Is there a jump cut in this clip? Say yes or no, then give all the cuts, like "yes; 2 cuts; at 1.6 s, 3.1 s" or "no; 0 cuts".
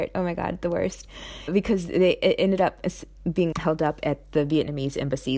no; 0 cuts